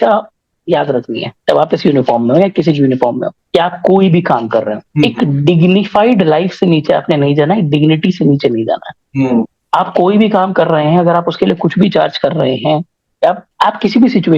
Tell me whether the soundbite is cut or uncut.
uncut